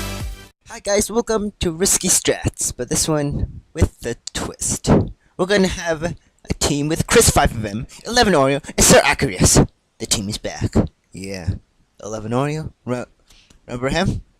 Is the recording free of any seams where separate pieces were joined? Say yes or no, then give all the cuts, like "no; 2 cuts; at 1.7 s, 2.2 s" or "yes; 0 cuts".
no; 1 cut; at 12.5 s